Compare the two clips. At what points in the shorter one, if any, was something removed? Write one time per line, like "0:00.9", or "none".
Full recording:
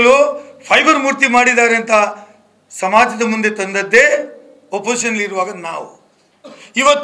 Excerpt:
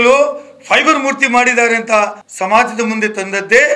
0:02.2